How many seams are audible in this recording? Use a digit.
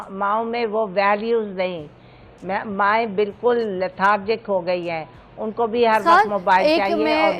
0